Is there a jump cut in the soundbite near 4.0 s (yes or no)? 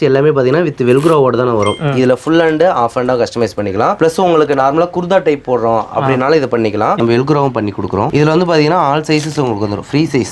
yes